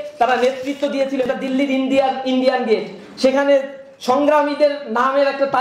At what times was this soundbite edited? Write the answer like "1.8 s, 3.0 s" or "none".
1.3 s